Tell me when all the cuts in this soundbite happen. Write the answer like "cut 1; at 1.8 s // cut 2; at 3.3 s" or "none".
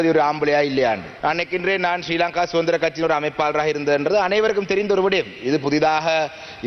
cut 1; at 1.1 s